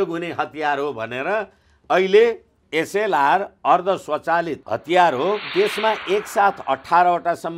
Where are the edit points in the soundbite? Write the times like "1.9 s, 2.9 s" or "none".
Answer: 2.6 s, 4.6 s, 5.4 s